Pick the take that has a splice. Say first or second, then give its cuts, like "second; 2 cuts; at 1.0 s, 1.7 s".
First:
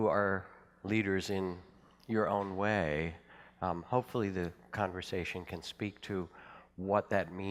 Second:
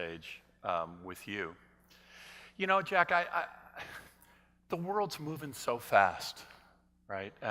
second; 1 cut; at 5.6 s